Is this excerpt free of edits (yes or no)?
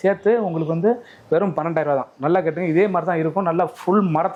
yes